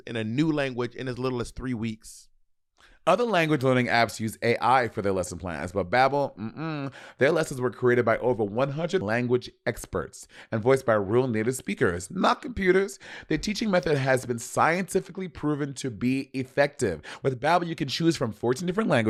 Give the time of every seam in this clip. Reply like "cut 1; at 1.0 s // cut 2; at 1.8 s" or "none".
none